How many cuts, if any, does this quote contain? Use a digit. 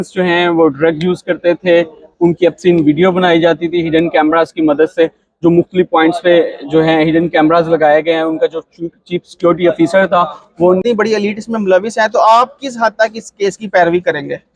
1